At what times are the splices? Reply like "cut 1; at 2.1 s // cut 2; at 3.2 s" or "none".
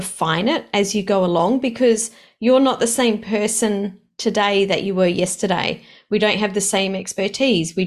none